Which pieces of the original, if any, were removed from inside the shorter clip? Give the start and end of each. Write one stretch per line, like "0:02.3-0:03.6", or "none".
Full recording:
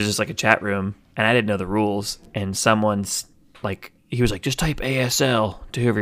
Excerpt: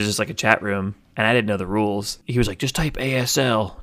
0:02.2-0:04.0

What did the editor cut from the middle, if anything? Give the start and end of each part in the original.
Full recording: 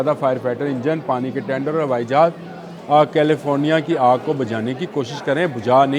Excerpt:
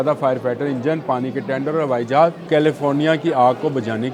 0:02.5-0:03.1

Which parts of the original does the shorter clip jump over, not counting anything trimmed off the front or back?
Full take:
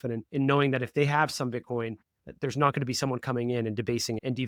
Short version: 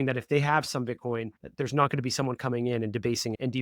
0:02.0-0:02.2

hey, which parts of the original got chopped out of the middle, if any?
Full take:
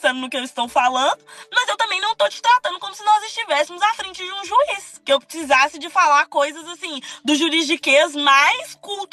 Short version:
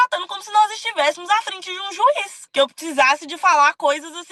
none

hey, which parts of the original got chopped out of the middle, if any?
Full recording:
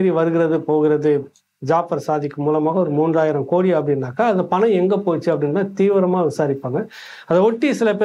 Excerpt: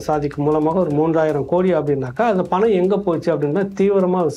none

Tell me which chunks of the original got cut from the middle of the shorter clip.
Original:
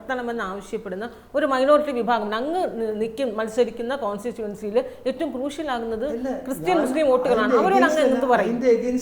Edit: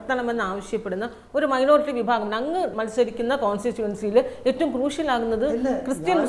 0:02.7-0:03.3

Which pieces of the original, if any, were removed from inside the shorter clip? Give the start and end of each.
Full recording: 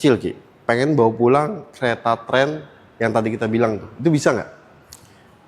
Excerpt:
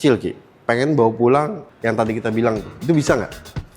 0:01.6-0:02.8

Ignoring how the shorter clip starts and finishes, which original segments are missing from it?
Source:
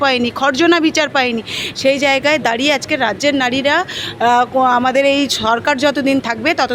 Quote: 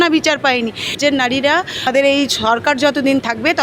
0:01.7-0:03.2
0:04.1-0:04.9

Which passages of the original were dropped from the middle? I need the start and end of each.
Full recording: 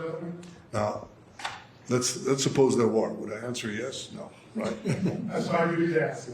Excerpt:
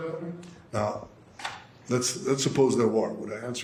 none

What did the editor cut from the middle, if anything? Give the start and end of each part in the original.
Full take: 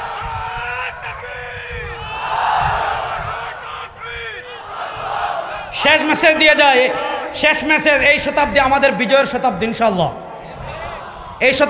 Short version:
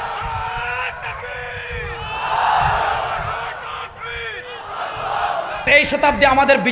0:05.7-0:08.0

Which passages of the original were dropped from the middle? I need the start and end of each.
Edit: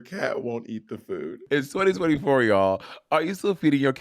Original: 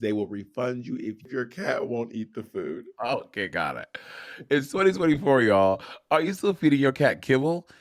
0:02.8-0:04.4

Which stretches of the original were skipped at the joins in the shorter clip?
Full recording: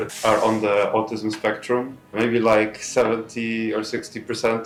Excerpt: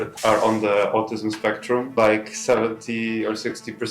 0:01.9-0:02.4

